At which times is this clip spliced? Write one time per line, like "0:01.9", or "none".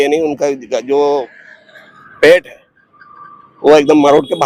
none